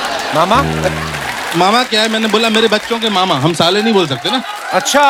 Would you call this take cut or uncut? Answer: uncut